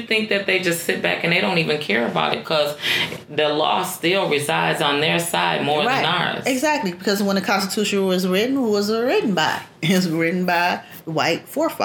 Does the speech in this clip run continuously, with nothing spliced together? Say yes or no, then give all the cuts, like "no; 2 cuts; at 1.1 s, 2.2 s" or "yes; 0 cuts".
no; 1 cut; at 10.9 s